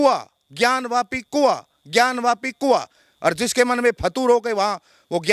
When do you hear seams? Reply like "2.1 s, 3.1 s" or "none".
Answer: none